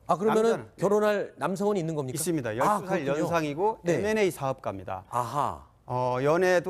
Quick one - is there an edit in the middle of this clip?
no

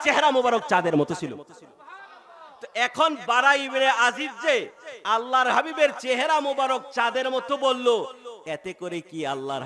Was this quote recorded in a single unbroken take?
yes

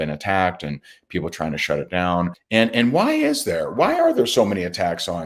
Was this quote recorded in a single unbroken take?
no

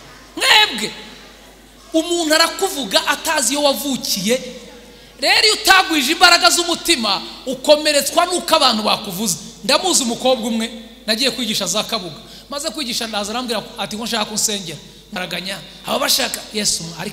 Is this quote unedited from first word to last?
no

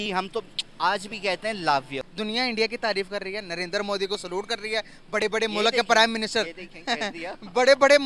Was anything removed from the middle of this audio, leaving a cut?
yes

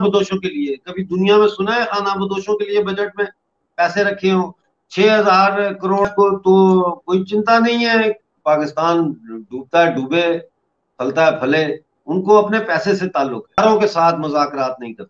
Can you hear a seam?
yes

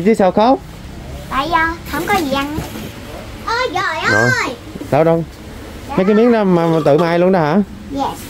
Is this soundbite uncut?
no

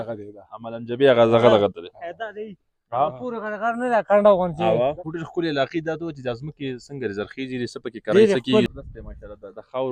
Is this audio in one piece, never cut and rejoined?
no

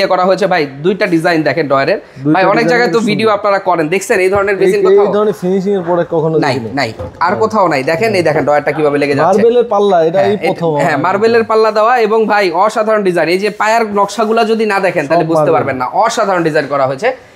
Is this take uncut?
yes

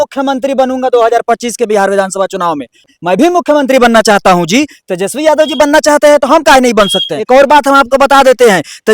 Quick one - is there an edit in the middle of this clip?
yes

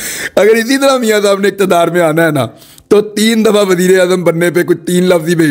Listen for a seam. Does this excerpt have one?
no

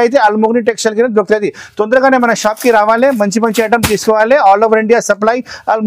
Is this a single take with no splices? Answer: yes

